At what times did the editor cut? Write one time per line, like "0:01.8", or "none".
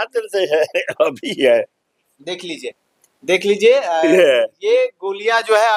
none